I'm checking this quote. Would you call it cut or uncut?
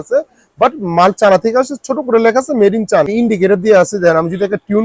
cut